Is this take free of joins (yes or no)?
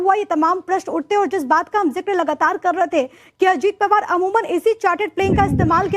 no